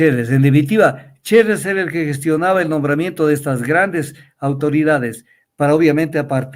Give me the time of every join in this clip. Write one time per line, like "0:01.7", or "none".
none